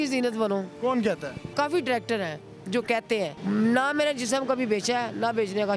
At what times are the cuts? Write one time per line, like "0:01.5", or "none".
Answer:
0:01.5
0:03.4